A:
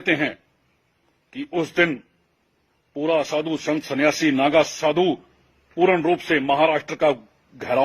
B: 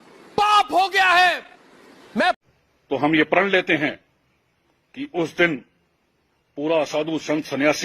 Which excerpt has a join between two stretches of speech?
B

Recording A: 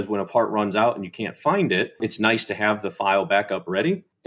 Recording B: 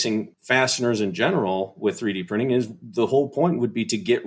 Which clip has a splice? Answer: A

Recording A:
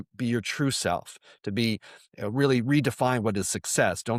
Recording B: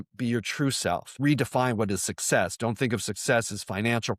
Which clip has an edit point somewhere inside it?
B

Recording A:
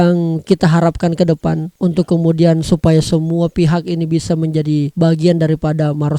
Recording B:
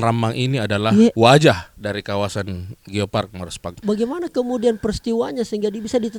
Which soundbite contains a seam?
B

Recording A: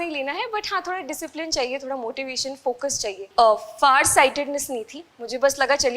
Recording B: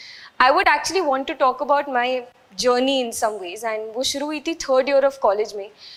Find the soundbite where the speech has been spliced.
A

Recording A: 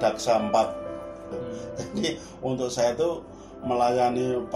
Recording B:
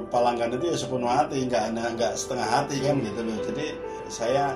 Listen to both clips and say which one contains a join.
A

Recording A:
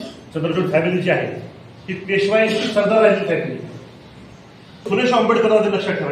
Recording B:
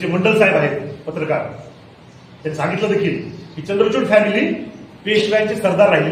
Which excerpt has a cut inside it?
A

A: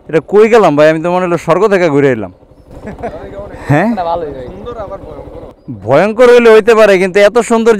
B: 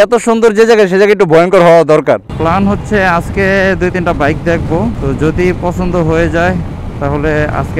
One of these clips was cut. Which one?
B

